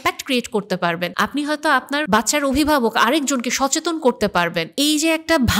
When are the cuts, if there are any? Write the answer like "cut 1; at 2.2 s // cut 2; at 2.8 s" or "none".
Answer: cut 1; at 1.1 s // cut 2; at 2.1 s // cut 3; at 4.7 s

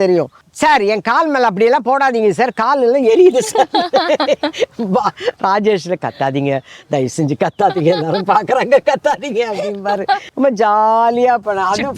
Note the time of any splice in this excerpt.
cut 1; at 10.3 s

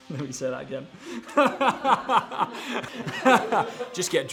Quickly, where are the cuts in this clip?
none

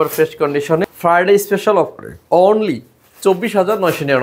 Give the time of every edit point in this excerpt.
cut 1; at 0.9 s

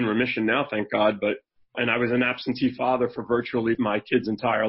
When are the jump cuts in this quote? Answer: cut 1; at 1.8 s // cut 2; at 3.8 s

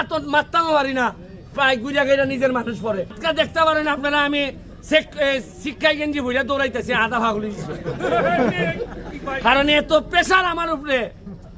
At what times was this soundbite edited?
cut 1; at 3.2 s

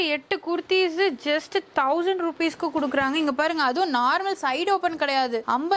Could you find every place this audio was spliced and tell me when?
none

